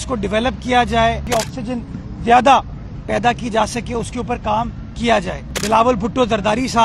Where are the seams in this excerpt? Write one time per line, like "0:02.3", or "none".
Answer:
0:01.2
0:05.5